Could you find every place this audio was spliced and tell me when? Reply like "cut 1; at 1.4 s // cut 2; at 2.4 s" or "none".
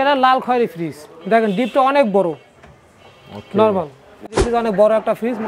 cut 1; at 4.3 s